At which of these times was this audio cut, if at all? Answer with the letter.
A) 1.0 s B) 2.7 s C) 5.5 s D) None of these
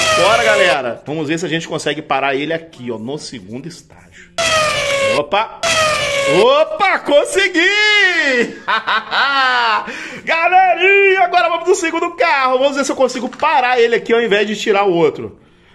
A